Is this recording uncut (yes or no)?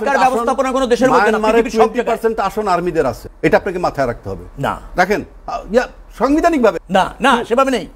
no